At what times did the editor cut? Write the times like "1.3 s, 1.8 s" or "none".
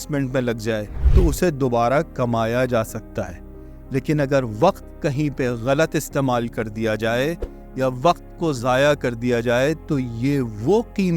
1.0 s